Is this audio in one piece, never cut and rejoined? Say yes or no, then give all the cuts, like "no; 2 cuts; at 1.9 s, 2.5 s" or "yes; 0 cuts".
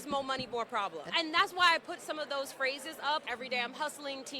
no; 2 cuts; at 1.0 s, 3.2 s